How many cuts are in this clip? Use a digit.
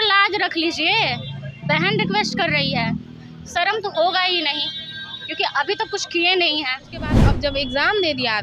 1